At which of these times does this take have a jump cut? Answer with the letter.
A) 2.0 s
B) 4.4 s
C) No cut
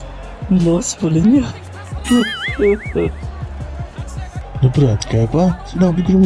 B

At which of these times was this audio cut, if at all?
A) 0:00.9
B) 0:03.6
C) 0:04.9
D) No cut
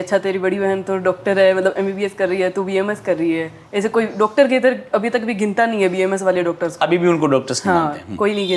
D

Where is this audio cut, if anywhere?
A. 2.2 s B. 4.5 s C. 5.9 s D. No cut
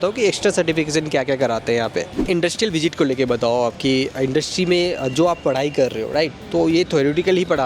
A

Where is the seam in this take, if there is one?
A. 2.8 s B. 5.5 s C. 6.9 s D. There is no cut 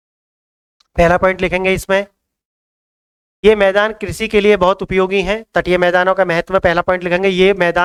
D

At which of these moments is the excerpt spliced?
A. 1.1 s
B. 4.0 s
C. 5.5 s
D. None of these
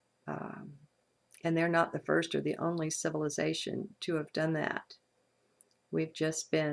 D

